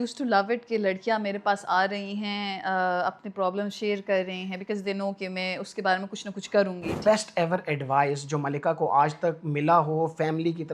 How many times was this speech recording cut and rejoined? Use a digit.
1